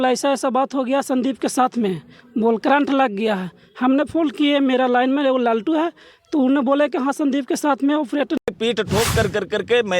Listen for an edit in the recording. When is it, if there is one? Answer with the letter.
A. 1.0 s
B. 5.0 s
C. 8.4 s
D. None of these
C